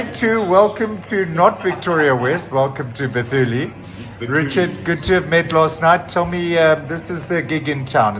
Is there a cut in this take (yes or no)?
no